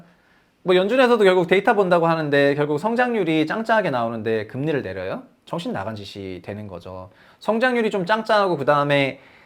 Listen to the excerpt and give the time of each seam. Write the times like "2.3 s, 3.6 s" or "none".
none